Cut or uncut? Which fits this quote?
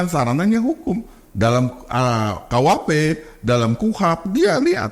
uncut